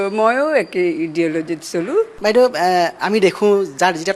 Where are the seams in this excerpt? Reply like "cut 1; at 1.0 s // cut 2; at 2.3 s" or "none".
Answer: cut 1; at 2.1 s